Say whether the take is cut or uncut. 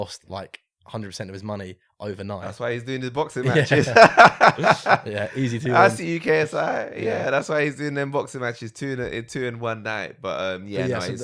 uncut